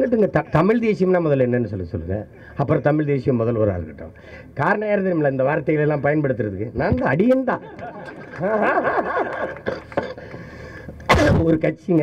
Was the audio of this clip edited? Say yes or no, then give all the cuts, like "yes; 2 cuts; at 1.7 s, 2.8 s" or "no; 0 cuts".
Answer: no; 0 cuts